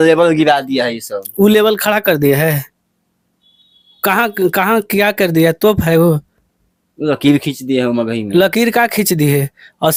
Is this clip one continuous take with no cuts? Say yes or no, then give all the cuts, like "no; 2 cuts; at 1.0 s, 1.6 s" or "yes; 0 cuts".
yes; 0 cuts